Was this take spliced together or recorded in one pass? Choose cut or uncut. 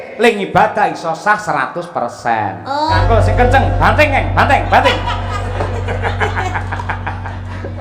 cut